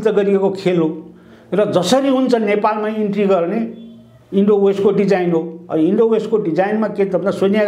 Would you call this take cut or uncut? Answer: uncut